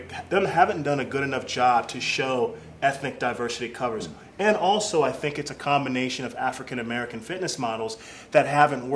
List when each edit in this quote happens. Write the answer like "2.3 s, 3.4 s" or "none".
none